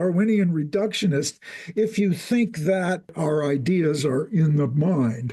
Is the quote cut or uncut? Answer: cut